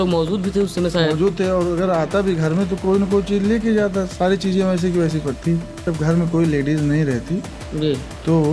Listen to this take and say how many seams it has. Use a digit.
1